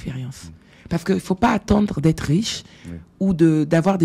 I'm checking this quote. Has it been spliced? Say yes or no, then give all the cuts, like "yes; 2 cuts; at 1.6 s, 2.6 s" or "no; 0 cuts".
no; 0 cuts